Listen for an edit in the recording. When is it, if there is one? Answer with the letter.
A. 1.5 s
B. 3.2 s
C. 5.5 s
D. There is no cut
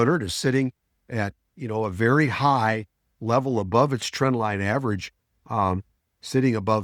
D